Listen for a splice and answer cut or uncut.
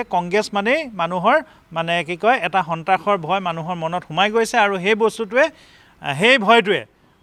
uncut